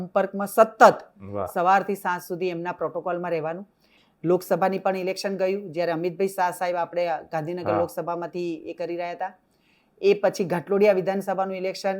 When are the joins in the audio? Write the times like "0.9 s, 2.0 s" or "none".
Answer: 3.9 s